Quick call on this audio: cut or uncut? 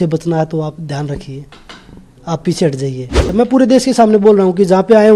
cut